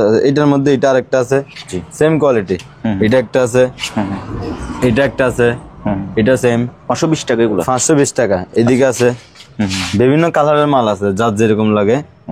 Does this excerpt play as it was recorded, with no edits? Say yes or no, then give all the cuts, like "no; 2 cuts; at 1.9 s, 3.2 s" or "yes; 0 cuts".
yes; 0 cuts